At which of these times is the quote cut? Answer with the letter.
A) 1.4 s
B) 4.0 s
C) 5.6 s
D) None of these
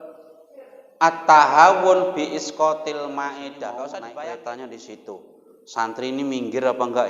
B